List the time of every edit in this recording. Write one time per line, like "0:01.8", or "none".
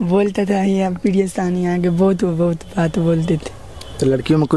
none